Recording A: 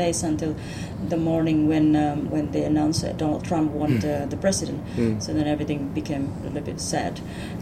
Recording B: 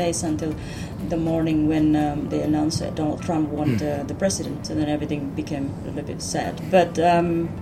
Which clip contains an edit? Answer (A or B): B